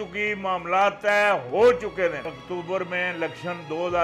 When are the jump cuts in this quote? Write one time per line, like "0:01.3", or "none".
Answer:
0:02.3